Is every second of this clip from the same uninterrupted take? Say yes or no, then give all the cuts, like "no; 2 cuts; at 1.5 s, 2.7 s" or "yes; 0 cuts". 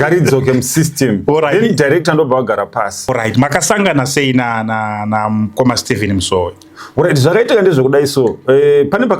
no; 1 cut; at 3.1 s